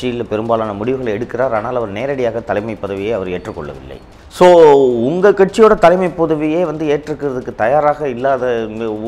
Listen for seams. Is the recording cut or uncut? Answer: uncut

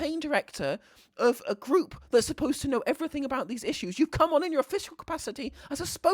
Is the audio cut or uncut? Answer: uncut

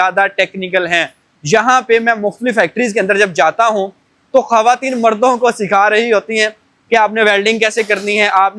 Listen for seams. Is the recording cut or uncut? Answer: uncut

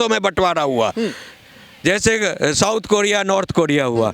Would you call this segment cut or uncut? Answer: uncut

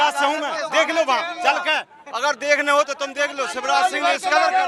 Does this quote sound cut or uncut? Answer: uncut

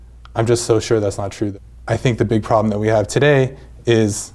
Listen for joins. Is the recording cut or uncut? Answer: cut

